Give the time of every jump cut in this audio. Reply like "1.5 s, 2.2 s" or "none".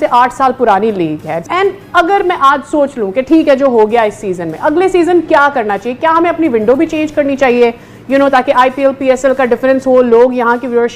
1.4 s